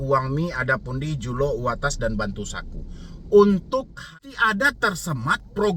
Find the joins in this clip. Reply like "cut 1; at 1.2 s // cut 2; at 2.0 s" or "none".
cut 1; at 4.1 s